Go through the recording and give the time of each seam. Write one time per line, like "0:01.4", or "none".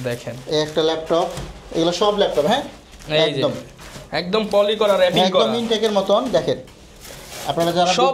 none